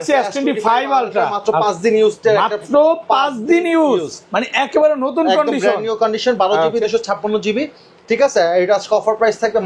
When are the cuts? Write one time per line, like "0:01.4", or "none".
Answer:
none